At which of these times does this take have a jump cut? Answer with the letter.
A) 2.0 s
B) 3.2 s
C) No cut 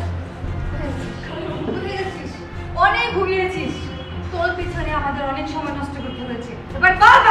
C